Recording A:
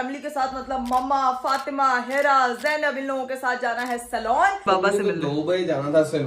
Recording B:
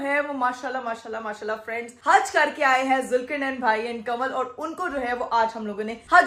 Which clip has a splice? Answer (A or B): A